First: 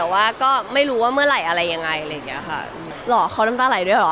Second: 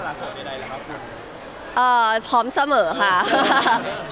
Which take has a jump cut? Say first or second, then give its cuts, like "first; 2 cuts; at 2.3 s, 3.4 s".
first; 1 cut; at 2.9 s